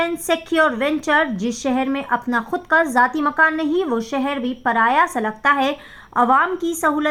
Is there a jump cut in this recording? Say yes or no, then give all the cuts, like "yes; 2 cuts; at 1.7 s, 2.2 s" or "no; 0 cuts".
no; 0 cuts